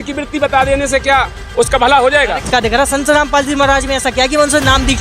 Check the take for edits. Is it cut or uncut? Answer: cut